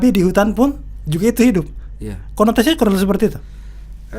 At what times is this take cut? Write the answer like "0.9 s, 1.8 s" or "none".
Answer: none

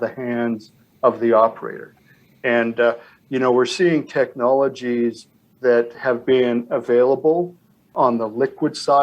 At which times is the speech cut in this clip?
7.9 s

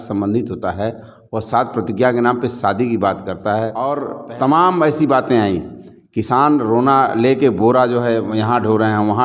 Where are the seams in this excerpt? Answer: 3.9 s

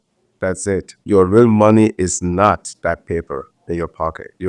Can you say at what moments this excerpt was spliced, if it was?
0.9 s

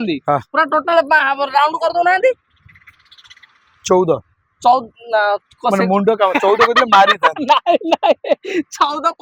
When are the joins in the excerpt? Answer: none

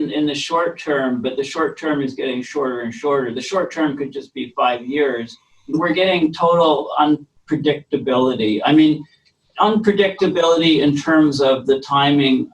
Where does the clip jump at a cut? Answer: 5.7 s

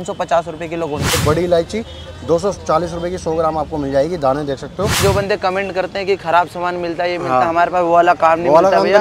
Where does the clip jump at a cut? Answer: 1.1 s, 5.0 s

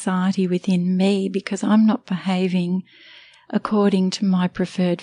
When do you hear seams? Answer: none

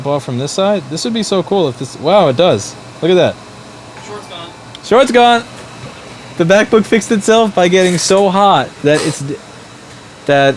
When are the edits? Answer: none

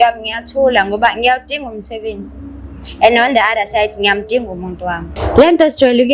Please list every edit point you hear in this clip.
5.1 s

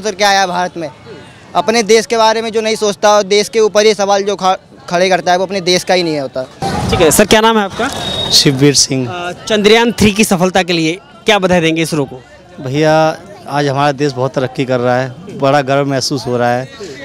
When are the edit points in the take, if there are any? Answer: none

